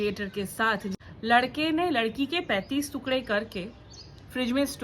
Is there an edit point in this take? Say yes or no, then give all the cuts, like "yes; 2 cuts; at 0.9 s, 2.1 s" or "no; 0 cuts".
yes; 1 cut; at 1.0 s